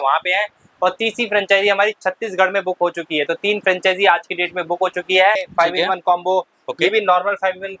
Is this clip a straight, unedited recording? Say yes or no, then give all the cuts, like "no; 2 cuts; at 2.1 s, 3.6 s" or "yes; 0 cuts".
no; 1 cut; at 5.5 s